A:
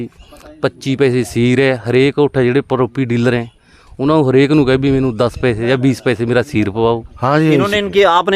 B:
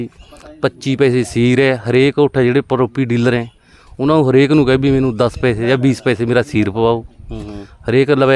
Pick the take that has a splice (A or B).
A